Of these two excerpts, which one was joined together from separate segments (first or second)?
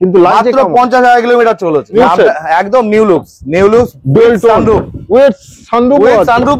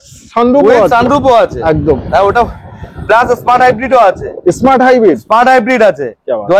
first